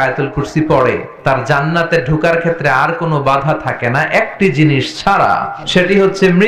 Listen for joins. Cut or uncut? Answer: cut